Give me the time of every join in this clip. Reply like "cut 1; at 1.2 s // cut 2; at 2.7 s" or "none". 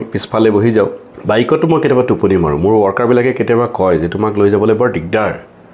cut 1; at 1.1 s

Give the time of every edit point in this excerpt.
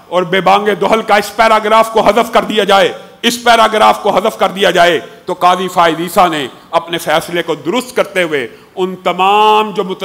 none

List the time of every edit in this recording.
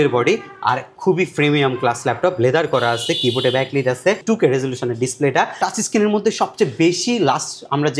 cut 1; at 4.2 s // cut 2; at 5.6 s

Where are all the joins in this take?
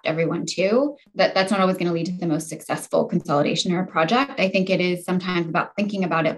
cut 1; at 1.0 s

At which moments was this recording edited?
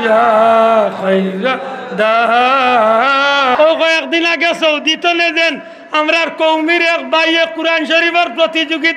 cut 1; at 3.5 s

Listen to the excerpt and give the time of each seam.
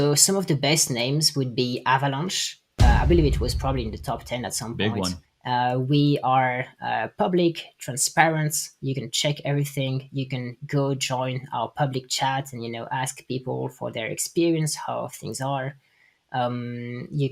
cut 1; at 5.3 s

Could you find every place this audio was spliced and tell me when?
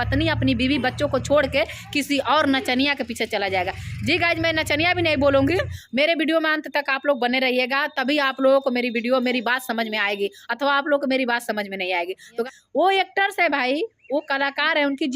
cut 1; at 5.7 s // cut 2; at 12.3 s

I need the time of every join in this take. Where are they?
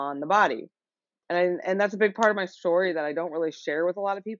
cut 1; at 1.2 s

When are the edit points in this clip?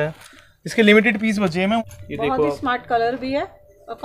cut 1; at 1.8 s

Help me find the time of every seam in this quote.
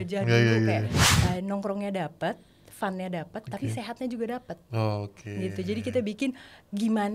cut 1; at 1.0 s

